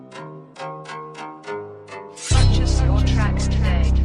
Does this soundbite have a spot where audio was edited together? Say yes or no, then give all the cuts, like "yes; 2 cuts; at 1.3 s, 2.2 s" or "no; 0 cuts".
yes; 1 cut; at 2.1 s